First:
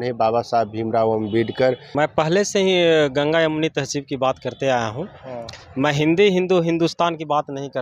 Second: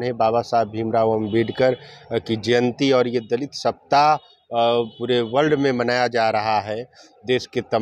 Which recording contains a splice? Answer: first; 1 cut; at 1.9 s

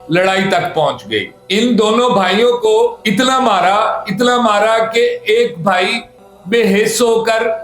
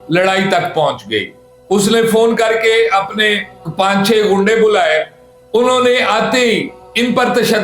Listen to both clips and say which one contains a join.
first; 1 cut; at 1.4 s

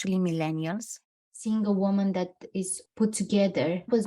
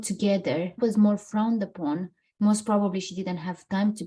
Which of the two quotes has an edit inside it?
first; 1 cut; at 1.4 s

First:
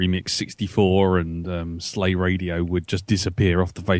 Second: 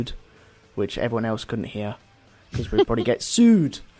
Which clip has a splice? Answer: first; 1 cut; at 1.0 s

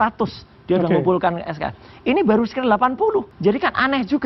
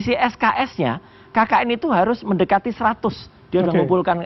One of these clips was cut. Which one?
first; 1 cut; at 3.3 s

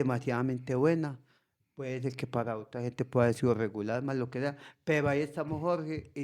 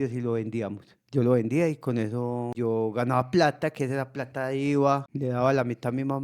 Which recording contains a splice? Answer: second; 2 cuts; at 2.5 s, 5.1 s

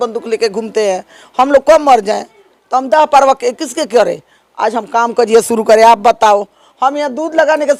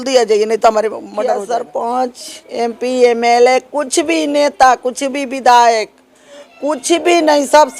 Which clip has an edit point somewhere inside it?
second; 1 cut; at 1.4 s

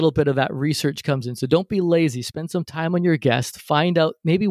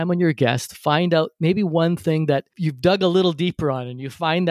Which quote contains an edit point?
second; 1 cut; at 2.6 s

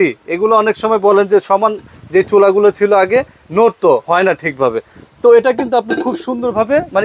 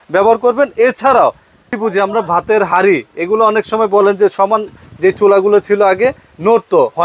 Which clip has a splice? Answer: second; 1 cut; at 1.7 s

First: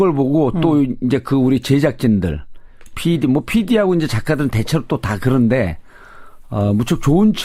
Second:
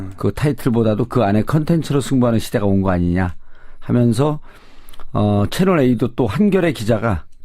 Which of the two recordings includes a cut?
second; 1 cut; at 3.7 s

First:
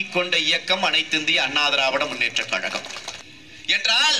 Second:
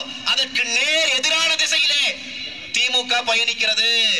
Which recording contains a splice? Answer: first; 1 cut; at 3.1 s

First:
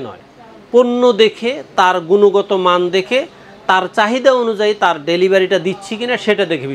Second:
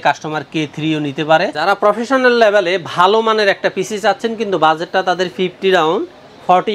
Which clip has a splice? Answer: second; 1 cut; at 1.6 s

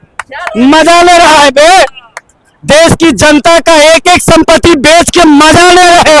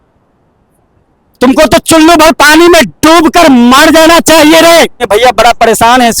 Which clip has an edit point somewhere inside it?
second; 1 cut; at 5.0 s

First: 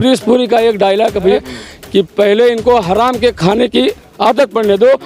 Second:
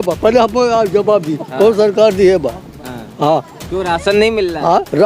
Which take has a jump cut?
first; 1 cut; at 1.4 s

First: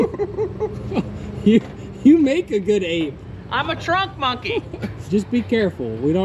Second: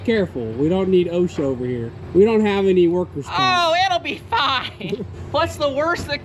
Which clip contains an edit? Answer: second; 2 cuts; at 1.9 s, 5.1 s

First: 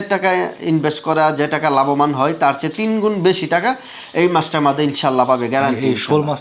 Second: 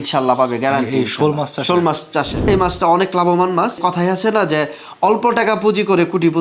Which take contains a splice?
second; 2 cuts; at 2.4 s, 3.8 s

